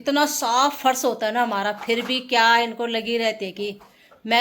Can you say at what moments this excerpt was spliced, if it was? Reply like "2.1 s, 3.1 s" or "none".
none